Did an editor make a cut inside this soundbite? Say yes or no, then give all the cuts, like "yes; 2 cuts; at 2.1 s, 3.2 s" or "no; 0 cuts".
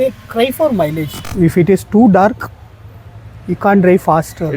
yes; 1 cut; at 1.1 s